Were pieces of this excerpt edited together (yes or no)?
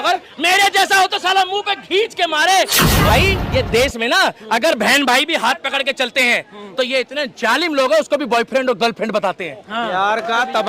yes